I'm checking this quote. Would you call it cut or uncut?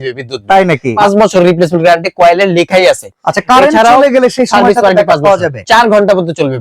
cut